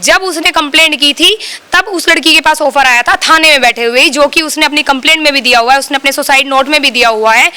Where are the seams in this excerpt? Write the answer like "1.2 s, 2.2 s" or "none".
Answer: none